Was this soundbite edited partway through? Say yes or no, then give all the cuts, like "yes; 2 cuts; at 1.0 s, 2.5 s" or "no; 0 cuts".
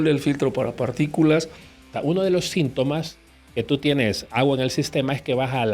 yes; 1 cut; at 1.8 s